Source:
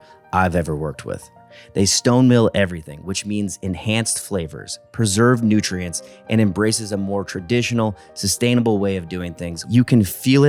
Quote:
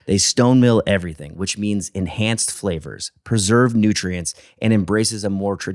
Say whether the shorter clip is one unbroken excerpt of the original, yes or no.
yes